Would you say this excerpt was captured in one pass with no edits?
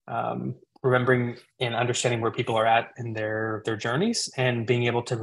yes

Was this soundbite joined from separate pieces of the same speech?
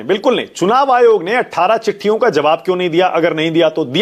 no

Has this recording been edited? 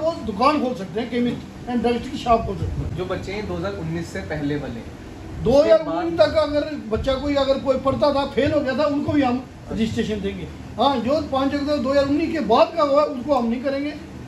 yes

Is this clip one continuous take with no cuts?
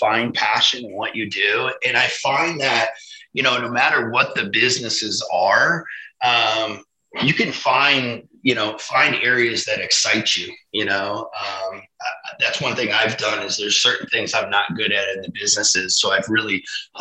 yes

